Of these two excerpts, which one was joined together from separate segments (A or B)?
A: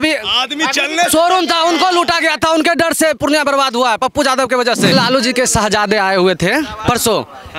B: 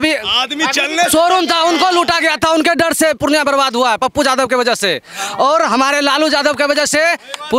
A